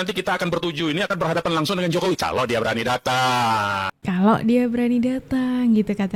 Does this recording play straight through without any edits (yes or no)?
yes